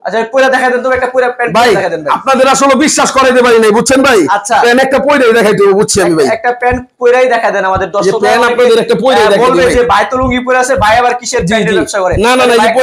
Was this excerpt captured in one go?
yes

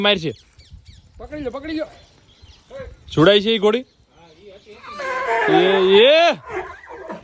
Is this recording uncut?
yes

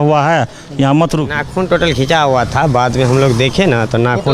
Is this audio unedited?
no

